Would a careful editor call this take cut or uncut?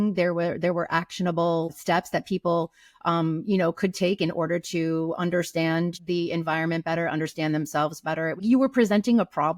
uncut